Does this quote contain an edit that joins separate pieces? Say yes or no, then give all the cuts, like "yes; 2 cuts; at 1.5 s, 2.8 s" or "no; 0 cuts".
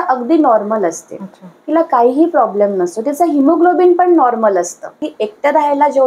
yes; 1 cut; at 5.0 s